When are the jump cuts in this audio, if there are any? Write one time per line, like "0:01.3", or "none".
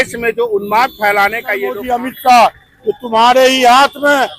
0:01.8